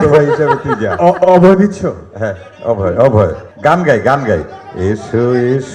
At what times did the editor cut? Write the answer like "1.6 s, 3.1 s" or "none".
3.5 s